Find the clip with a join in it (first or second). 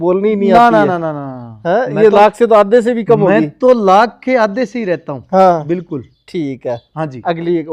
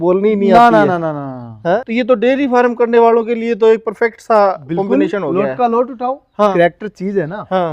second